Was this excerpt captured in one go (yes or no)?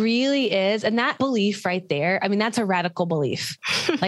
no